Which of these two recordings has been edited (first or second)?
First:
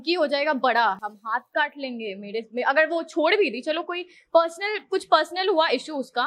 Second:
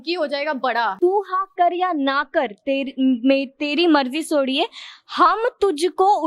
second